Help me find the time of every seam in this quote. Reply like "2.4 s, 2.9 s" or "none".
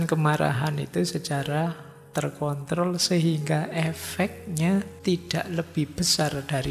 4.9 s